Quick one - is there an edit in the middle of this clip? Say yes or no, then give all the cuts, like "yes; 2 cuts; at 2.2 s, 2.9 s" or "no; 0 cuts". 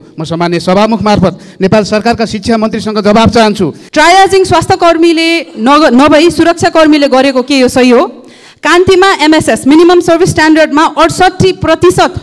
yes; 1 cut; at 3.8 s